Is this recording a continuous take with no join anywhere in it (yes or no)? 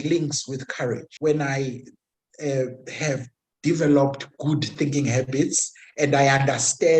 no